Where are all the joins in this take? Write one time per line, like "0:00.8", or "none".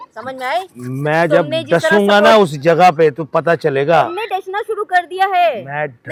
none